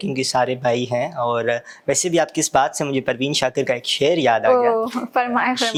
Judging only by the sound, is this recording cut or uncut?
uncut